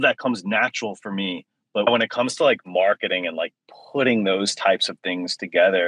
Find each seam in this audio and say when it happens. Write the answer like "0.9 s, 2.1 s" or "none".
1.9 s